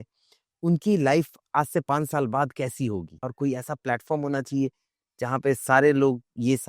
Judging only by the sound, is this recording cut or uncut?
cut